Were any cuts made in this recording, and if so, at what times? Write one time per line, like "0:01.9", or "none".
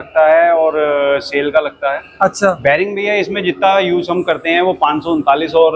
0:02.6